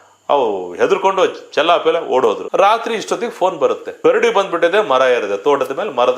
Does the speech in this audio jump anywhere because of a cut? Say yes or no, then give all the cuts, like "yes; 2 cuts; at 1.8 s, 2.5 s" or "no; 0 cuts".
yes; 1 cut; at 2.4 s